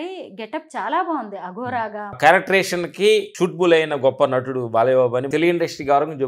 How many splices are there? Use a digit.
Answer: 2